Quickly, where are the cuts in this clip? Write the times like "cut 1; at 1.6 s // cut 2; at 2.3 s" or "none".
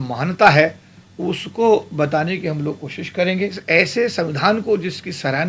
cut 1; at 3.6 s